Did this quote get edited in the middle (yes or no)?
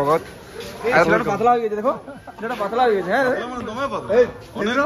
yes